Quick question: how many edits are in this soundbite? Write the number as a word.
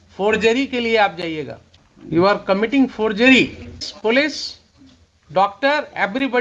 two